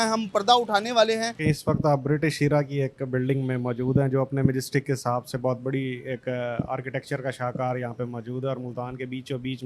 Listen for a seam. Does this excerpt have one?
yes; 1 cut; at 1.3 s

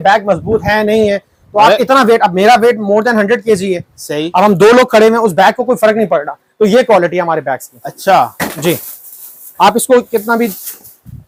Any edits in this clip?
no; 0 cuts

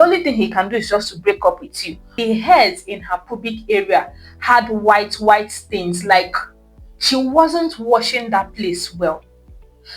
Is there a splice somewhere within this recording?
yes; 1 cut; at 2.1 s

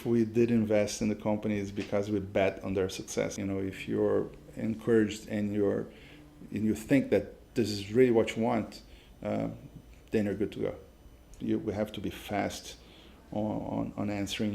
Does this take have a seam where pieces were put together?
yes; 2 cuts; at 3.3 s, 11.4 s

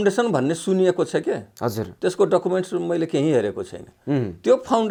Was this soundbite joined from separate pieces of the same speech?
no; 0 cuts

